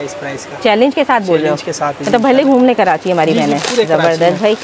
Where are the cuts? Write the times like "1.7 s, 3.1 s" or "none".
none